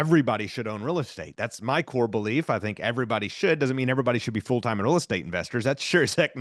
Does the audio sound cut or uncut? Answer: uncut